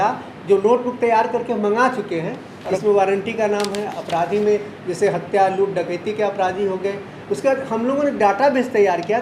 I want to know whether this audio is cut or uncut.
cut